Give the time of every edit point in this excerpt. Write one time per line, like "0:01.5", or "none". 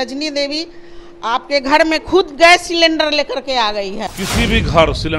0:04.1